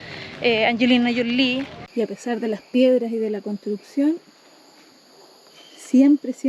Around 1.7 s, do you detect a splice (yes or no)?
yes